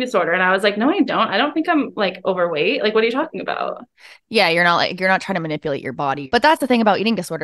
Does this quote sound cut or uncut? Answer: uncut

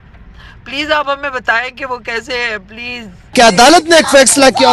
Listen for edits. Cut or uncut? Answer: cut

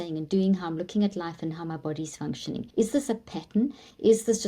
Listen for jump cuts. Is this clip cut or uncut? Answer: cut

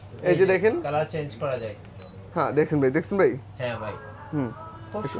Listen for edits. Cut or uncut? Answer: uncut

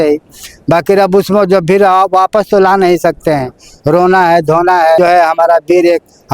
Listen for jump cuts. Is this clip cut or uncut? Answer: cut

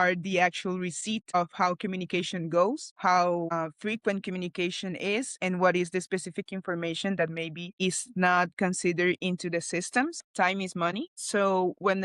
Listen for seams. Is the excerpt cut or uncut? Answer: cut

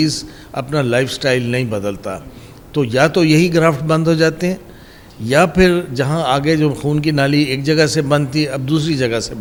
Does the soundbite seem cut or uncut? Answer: uncut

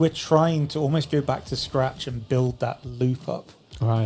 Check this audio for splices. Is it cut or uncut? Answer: uncut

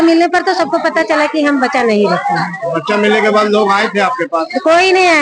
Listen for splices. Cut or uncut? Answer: uncut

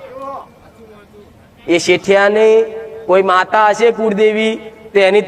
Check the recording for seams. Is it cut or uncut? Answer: uncut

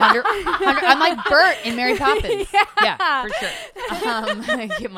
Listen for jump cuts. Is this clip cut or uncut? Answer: cut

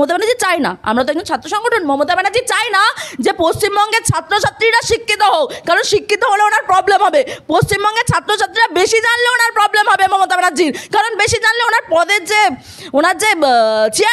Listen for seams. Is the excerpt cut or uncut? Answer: uncut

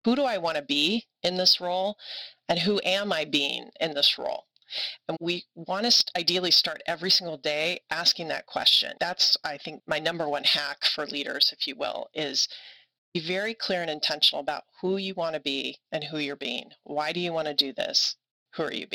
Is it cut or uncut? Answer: cut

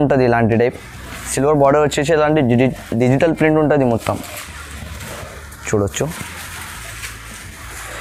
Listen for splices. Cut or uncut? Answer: uncut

